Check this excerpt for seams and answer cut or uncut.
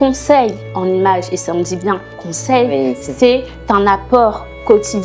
uncut